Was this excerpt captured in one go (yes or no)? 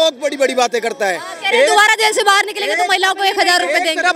yes